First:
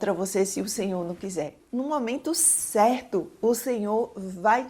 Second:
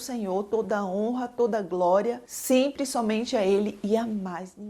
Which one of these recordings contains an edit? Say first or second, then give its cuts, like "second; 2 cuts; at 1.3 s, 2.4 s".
first; 1 cut; at 1.6 s